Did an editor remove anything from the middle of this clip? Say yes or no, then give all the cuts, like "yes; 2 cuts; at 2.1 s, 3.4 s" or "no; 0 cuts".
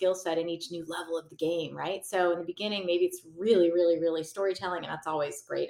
no; 0 cuts